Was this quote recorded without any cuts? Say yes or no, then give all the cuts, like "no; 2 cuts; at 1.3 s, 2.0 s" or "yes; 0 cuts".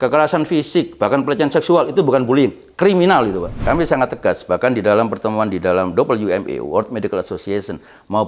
no; 1 cut; at 3.6 s